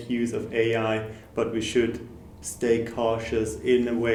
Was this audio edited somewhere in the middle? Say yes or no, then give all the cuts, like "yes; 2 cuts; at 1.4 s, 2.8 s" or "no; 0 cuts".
no; 0 cuts